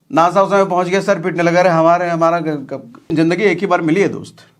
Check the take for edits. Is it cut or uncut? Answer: cut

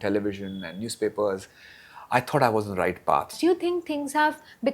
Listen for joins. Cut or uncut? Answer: cut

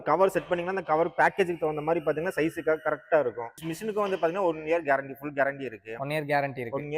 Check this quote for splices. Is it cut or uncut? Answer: cut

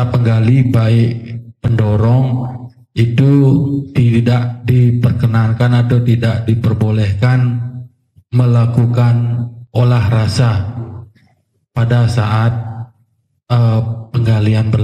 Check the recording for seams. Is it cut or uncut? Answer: uncut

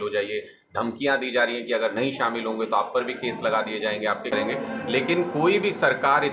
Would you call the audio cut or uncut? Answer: cut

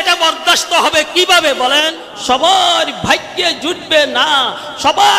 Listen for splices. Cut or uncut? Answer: cut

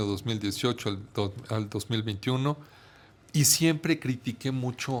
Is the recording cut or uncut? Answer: uncut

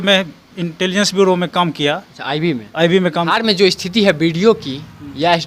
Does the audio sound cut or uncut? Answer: cut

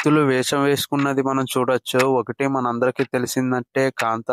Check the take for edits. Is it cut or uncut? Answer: uncut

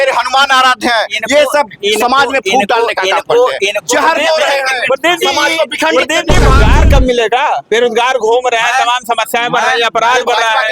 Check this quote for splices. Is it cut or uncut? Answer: cut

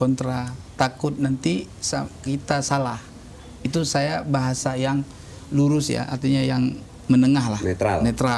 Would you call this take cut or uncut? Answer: uncut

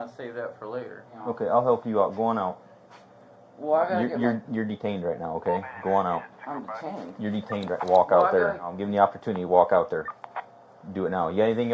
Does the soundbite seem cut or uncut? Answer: cut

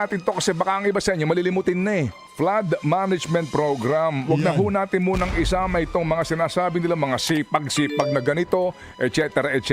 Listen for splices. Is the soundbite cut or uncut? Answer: cut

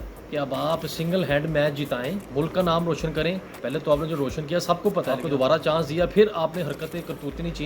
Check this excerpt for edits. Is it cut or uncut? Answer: cut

